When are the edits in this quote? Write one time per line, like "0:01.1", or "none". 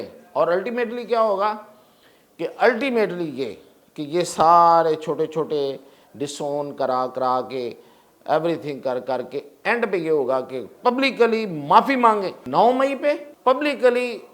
0:12.4
0:13.3